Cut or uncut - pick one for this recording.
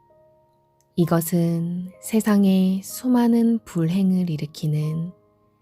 cut